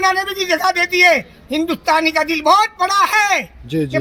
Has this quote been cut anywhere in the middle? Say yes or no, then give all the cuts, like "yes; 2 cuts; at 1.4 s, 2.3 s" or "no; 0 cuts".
no; 0 cuts